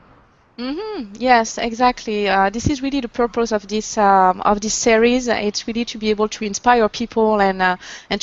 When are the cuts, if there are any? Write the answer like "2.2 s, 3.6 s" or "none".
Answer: 5.8 s